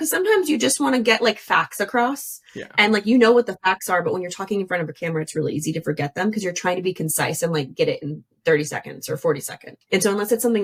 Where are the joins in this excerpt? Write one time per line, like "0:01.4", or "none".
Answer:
none